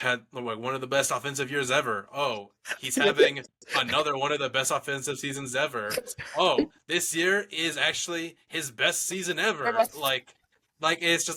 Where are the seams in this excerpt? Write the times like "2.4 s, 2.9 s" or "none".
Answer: none